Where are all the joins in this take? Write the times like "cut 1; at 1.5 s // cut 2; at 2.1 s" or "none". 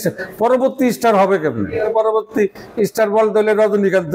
cut 1; at 1.9 s